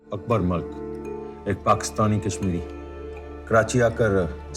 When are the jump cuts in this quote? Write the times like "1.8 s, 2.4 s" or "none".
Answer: 1.2 s